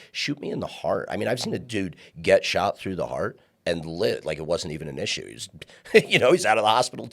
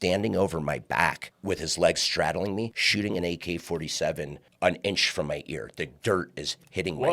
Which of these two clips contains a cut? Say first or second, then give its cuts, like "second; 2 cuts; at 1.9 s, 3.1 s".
second; 3 cuts; at 1.3 s, 2.8 s, 4.4 s